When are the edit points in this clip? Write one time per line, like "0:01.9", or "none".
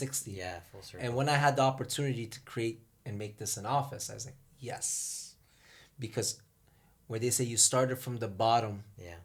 none

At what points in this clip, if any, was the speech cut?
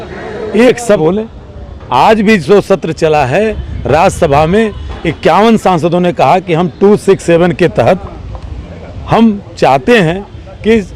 0:01.0

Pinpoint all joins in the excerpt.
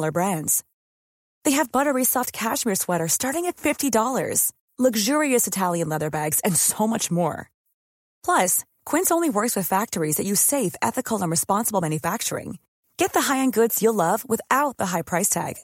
none

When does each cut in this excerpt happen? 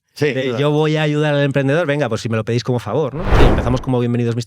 0:03.2

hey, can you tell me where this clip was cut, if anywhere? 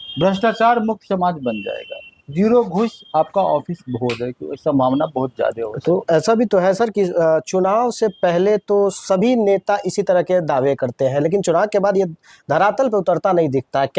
none

